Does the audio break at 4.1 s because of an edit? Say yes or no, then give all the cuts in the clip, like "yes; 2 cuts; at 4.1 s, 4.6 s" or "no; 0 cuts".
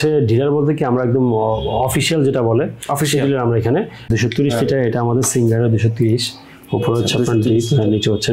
yes; 1 cut; at 4.1 s